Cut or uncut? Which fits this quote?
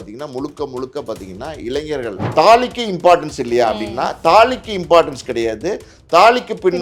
cut